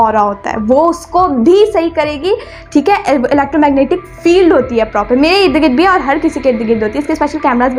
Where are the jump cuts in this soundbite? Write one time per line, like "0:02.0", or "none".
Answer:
none